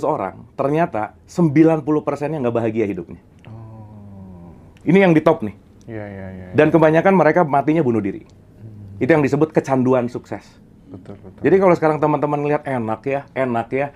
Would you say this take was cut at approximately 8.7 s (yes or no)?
no